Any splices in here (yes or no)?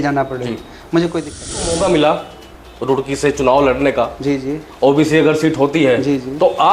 yes